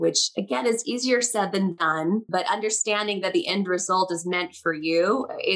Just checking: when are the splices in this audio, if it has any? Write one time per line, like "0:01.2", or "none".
0:02.0